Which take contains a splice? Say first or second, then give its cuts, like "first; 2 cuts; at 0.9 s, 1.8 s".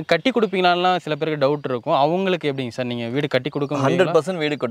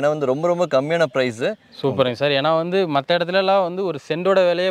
second; 1 cut; at 1.7 s